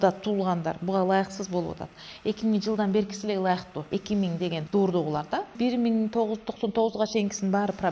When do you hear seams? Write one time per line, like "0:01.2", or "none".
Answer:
0:04.2
0:05.5